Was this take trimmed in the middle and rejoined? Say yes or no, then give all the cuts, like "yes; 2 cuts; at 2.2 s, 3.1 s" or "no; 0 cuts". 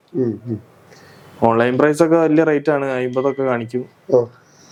no; 0 cuts